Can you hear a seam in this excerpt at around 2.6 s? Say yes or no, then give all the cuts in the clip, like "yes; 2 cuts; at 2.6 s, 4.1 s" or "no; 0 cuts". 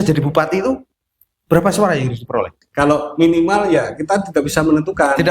yes; 1 cut; at 2.6 s